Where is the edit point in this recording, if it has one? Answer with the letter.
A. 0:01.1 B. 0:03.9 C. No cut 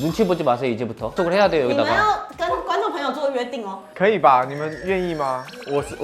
A